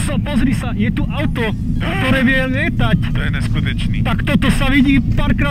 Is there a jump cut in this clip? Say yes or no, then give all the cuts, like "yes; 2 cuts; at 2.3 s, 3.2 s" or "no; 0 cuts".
no; 0 cuts